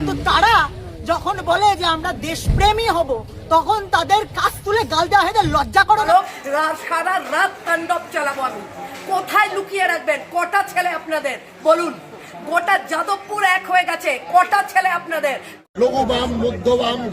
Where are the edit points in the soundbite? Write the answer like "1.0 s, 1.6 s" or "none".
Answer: 6.1 s, 15.5 s